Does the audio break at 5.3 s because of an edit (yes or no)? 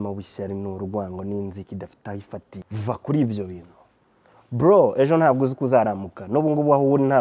no